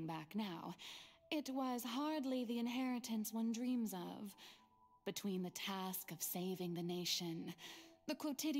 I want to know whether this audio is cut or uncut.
uncut